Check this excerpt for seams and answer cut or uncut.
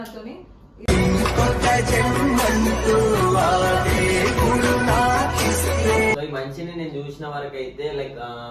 cut